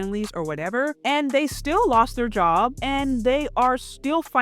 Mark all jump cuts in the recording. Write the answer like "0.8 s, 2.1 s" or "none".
1.0 s, 2.8 s